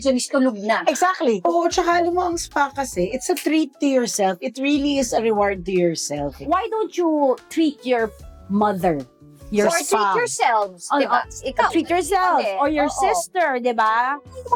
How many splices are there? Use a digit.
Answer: 0